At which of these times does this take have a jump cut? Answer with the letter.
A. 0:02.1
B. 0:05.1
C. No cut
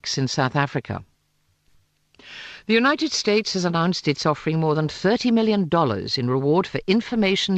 B